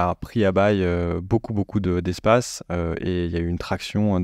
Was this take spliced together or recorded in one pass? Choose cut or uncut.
uncut